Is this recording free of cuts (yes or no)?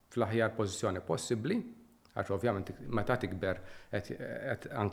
yes